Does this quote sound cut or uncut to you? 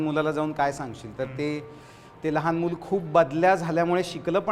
uncut